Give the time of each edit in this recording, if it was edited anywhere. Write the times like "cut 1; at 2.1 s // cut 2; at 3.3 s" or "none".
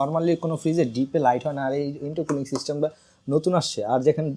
none